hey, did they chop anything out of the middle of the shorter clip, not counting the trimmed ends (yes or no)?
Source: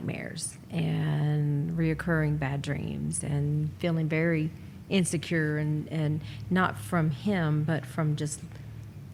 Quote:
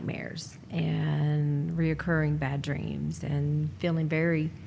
no